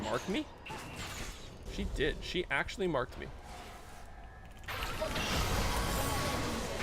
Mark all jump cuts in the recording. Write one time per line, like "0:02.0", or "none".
0:01.6